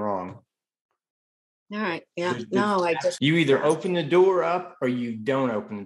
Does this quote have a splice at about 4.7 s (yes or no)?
no